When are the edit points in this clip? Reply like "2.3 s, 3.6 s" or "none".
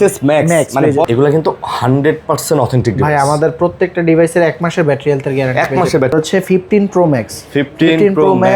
1.1 s, 6.1 s